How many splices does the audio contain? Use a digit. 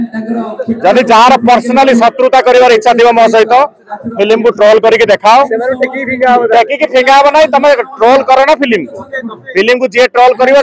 0